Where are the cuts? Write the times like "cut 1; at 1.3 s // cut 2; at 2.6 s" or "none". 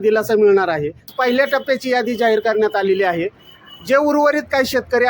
cut 1; at 1.0 s